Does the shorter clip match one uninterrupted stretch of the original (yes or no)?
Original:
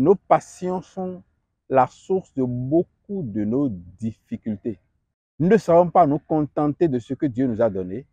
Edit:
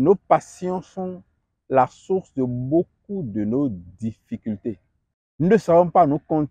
yes